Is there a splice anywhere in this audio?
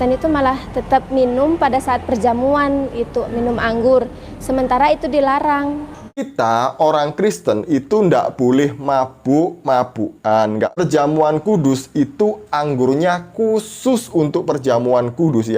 yes; 2 cuts; at 6.3 s, 10.8 s

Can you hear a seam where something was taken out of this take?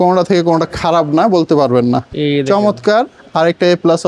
yes; 1 cut; at 2.1 s

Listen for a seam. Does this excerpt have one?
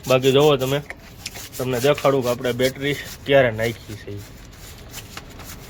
no; 0 cuts

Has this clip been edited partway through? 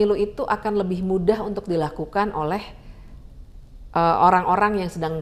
no; 0 cuts

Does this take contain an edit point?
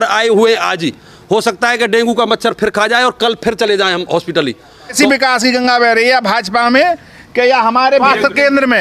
yes; 2 cuts; at 4.9 s, 8.0 s

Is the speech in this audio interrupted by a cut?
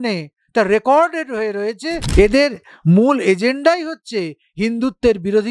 yes; 1 cut; at 2.0 s

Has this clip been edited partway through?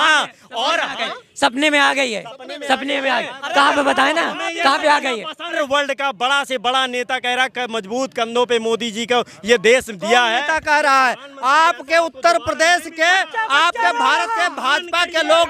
yes; 1 cut; at 5.5 s

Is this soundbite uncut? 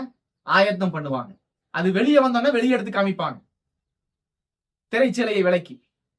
yes; 0 cuts

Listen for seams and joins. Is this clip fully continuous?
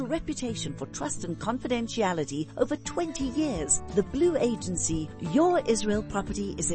yes; 0 cuts

